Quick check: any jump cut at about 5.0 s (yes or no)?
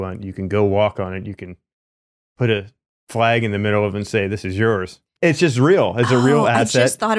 yes